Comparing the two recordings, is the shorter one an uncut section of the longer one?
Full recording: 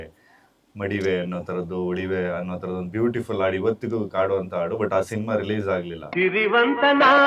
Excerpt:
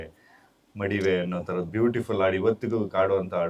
no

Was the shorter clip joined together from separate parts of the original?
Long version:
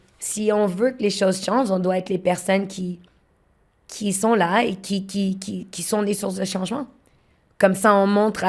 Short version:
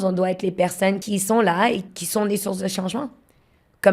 yes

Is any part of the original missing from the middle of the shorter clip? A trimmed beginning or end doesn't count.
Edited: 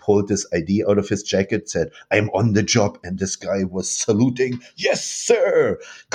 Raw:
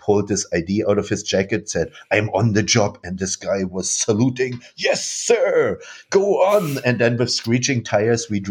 no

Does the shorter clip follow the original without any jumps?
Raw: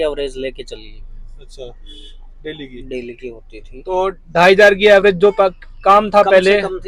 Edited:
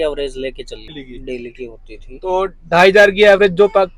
no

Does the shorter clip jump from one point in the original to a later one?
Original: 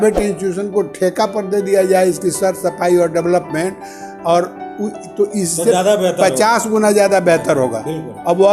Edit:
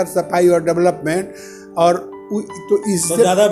no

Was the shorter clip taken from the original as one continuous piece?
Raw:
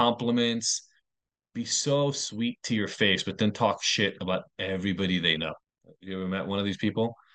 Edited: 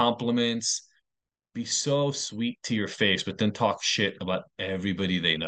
yes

